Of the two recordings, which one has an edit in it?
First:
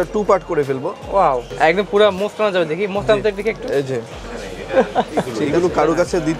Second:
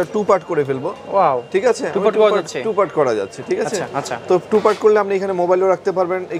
first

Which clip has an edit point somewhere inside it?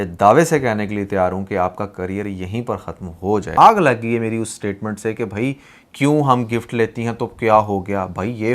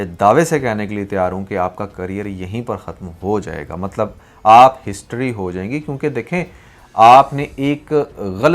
first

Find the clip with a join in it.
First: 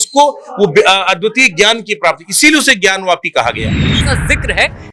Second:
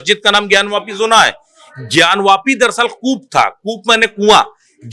first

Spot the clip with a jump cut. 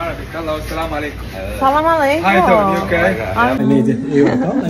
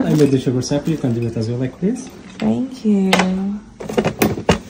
first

